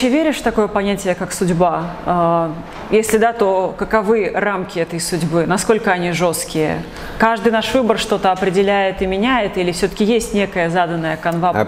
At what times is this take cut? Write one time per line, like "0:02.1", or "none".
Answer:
none